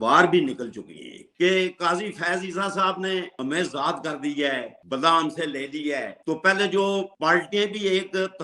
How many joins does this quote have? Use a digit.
1